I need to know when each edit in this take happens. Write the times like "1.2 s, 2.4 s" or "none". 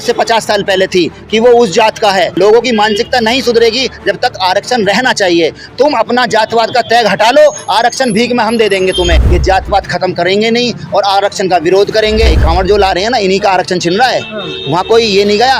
2.3 s, 9.3 s, 12.4 s